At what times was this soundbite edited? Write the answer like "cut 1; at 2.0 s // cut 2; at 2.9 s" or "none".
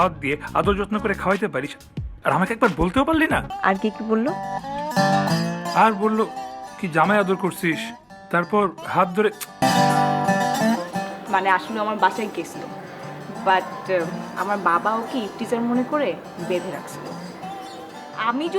cut 1; at 3.5 s // cut 2; at 9.6 s